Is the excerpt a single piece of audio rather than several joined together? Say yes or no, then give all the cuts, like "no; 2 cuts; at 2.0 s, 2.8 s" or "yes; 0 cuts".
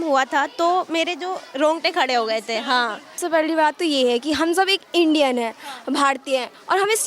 no; 1 cut; at 3.2 s